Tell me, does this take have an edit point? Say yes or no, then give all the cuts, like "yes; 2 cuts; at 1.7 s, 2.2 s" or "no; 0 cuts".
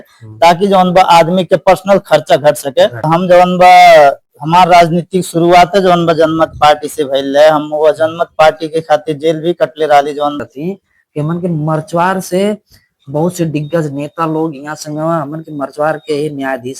yes; 2 cuts; at 3.0 s, 10.4 s